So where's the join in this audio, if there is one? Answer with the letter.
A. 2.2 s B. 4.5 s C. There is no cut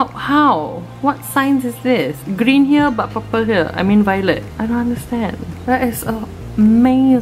A